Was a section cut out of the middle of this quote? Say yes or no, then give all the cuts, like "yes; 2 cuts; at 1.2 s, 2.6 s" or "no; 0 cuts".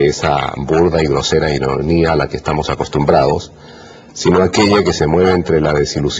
no; 0 cuts